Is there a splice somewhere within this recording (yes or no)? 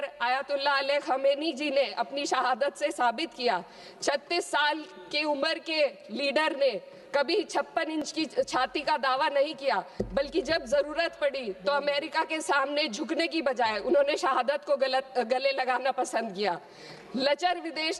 no